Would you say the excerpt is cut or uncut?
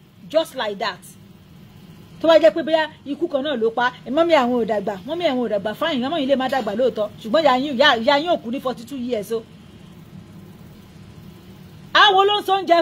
cut